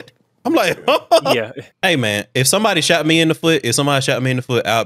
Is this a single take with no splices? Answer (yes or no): no